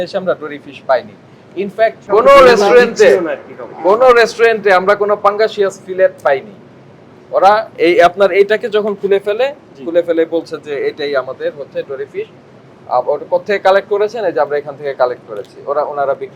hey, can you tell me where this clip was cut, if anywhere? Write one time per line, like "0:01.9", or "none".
0:02.0